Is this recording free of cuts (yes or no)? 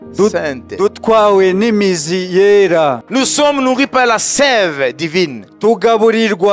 no